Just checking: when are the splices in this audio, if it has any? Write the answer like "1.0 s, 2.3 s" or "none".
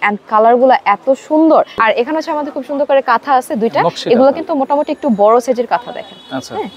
1.7 s